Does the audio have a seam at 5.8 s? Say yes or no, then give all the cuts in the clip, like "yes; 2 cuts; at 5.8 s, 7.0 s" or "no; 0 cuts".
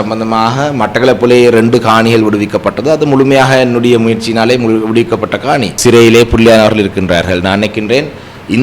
yes; 1 cut; at 5.8 s